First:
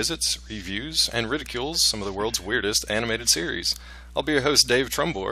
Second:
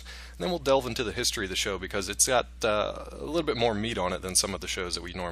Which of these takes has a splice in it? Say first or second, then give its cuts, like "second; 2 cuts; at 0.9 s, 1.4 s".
second; 1 cut; at 1.1 s